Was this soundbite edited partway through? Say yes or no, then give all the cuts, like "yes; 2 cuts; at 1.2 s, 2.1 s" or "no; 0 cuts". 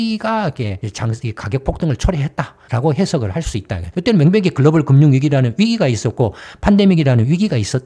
no; 0 cuts